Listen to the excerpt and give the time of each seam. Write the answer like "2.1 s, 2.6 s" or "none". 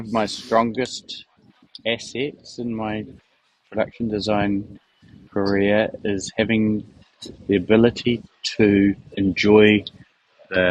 none